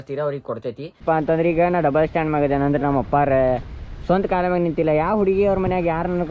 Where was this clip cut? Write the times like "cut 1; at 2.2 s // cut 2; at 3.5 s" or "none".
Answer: cut 1; at 1.0 s